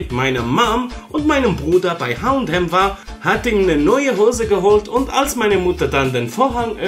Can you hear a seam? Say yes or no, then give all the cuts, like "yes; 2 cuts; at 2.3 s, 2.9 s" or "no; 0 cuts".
yes; 1 cut; at 3.1 s